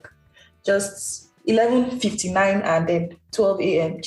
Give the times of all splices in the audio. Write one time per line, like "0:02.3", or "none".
0:01.3